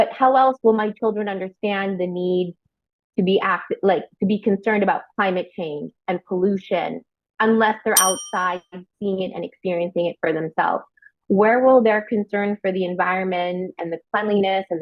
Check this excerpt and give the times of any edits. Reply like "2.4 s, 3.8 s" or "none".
none